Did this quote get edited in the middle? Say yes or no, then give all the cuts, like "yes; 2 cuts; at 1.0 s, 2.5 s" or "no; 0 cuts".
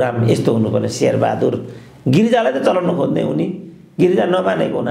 no; 0 cuts